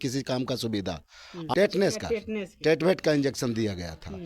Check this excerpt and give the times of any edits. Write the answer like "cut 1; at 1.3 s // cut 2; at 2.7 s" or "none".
cut 1; at 1.5 s